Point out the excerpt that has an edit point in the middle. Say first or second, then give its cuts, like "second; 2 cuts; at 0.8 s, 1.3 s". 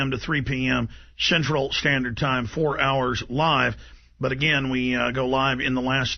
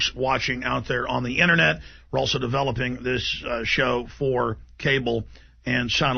first; 1 cut; at 4.3 s